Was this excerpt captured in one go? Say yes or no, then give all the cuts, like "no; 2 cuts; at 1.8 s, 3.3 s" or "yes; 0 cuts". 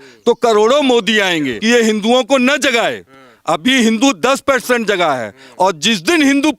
no; 1 cut; at 1.5 s